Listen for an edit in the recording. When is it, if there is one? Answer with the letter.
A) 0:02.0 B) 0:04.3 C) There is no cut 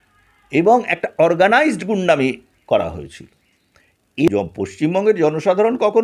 B